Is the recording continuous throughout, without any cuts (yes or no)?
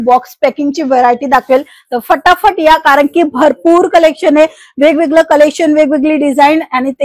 yes